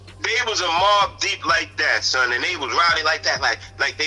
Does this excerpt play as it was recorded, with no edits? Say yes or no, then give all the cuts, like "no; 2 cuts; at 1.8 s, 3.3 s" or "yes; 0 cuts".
yes; 0 cuts